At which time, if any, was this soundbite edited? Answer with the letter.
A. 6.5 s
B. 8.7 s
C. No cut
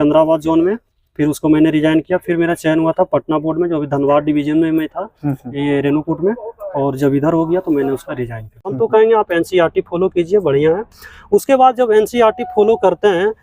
B